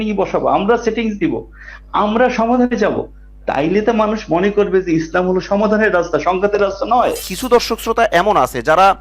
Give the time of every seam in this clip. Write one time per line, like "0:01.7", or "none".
0:07.3